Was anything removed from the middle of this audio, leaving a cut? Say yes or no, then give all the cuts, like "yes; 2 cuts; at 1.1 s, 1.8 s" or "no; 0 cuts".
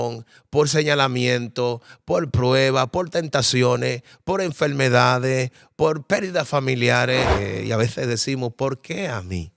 yes; 1 cut; at 7.4 s